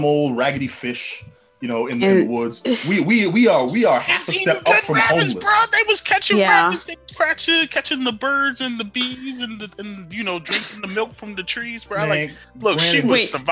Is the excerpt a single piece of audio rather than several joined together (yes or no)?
yes